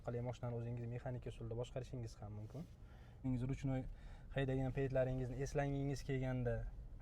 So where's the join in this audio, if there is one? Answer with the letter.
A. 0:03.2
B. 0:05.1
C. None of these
A